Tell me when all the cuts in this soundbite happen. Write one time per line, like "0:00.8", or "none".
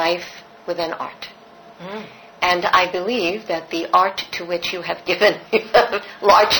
none